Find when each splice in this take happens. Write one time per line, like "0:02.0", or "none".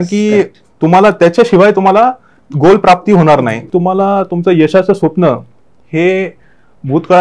0:03.6